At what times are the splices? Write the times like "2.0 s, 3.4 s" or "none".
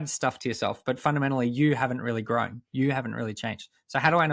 none